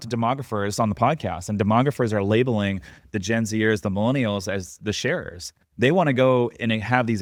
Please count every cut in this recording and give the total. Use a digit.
0